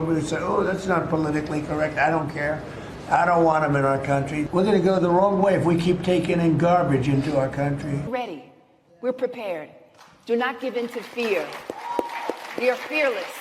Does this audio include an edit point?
yes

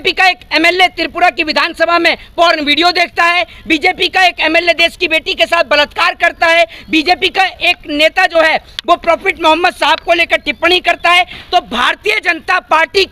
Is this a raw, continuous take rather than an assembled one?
yes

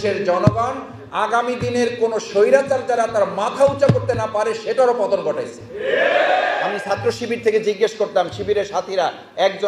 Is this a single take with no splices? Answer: no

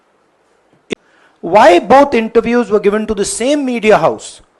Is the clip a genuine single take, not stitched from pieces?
no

